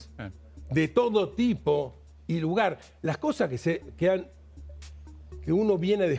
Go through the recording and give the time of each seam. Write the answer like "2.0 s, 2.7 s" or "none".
none